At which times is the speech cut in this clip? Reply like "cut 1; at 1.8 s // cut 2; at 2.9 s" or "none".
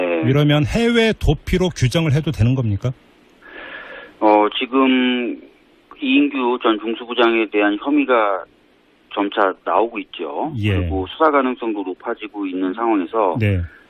cut 1; at 10.0 s